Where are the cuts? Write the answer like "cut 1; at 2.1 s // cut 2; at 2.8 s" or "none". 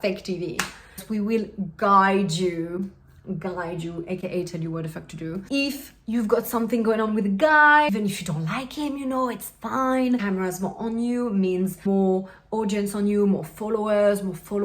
cut 1; at 1.0 s // cut 2; at 5.5 s // cut 3; at 7.9 s // cut 4; at 10.2 s // cut 5; at 11.8 s